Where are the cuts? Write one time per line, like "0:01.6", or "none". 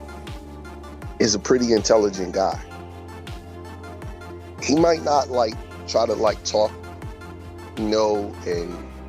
0:01.1